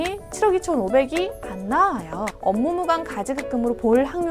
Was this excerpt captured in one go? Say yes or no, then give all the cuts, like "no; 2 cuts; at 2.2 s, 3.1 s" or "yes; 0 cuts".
no; 1 cut; at 2.3 s